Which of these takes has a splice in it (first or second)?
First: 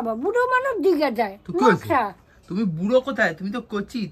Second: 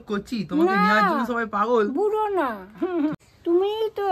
second